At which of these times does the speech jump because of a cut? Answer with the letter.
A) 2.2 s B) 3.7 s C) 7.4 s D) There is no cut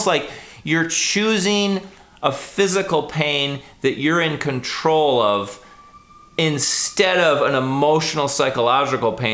D